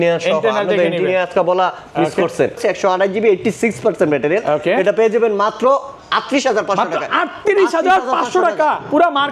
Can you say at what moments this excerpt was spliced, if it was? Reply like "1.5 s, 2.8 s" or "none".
2.6 s

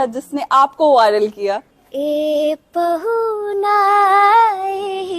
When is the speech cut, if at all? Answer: 1.7 s

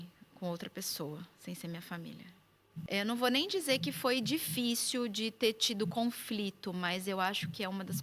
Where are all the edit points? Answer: 2.9 s

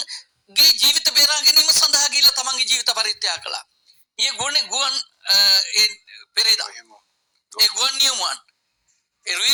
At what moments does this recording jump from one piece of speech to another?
none

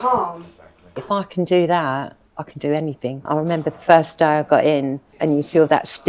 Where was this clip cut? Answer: 1.0 s, 3.2 s, 5.0 s

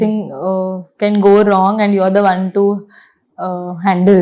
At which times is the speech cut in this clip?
none

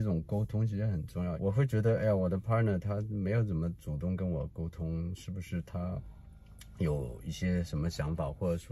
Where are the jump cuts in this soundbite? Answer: 1.4 s

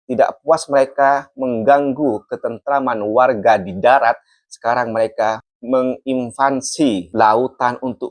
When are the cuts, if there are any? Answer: 7.1 s

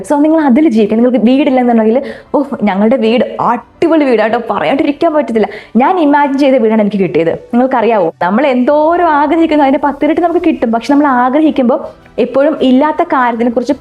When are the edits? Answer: 8.2 s

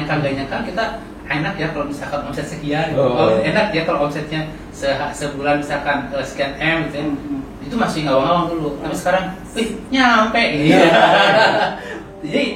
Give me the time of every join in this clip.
none

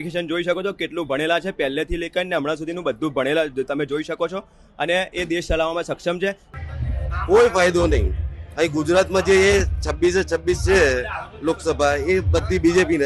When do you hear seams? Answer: 6.5 s

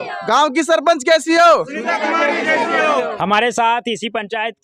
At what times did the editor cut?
none

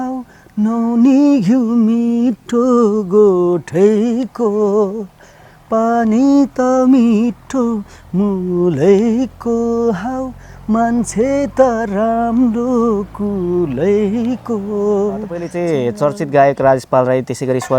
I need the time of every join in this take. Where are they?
15.5 s

